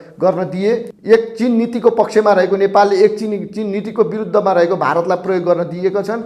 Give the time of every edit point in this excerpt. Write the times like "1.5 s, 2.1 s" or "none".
0.9 s